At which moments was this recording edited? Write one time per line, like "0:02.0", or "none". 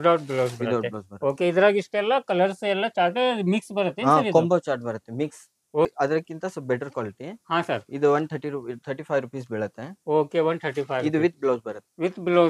0:05.9